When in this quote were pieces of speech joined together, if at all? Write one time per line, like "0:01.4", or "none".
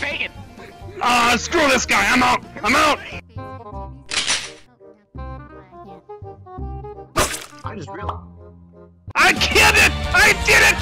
0:03.2